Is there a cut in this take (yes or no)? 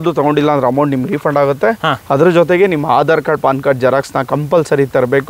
no